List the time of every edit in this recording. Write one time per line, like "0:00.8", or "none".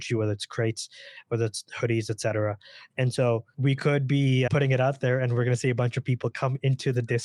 none